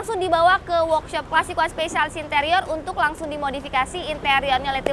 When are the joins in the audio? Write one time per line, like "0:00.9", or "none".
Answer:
none